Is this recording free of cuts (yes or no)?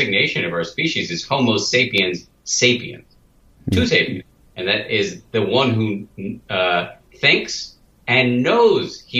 yes